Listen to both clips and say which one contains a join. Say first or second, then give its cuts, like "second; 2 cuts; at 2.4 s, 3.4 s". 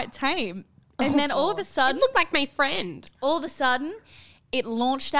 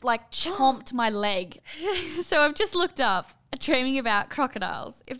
second; 1 cut; at 1.5 s